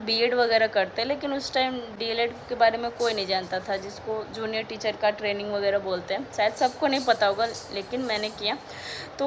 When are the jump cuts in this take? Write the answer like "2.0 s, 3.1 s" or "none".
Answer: none